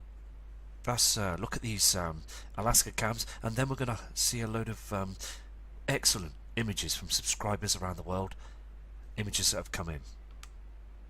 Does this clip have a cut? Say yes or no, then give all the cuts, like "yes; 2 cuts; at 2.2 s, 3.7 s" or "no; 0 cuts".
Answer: yes; 1 cut; at 1.7 s